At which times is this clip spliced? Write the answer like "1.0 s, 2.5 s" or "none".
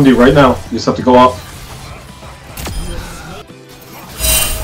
3.5 s